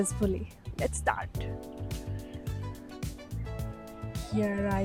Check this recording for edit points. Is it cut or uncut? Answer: uncut